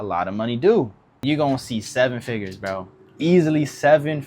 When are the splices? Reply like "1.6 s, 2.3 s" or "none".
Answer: 1.1 s